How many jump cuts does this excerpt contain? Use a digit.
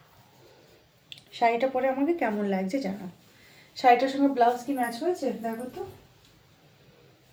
0